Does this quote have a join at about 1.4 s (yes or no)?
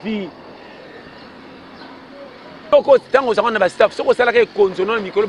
no